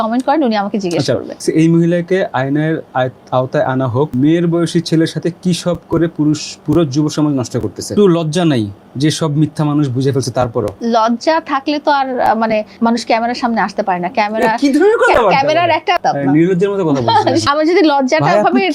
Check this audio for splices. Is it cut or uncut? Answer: cut